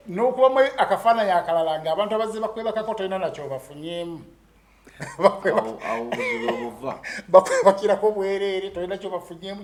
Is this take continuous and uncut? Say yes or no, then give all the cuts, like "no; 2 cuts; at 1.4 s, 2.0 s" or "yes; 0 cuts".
yes; 0 cuts